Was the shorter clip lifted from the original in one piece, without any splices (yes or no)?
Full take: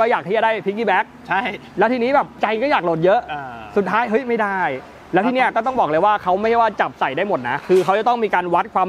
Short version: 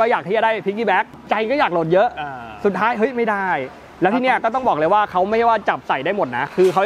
no